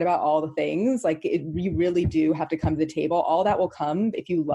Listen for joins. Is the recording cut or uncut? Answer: uncut